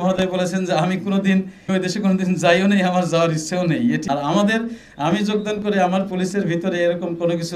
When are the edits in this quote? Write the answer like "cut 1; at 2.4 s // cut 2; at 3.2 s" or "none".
cut 1; at 1.7 s // cut 2; at 4.1 s